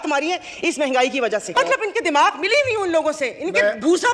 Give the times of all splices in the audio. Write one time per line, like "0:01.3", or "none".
0:01.5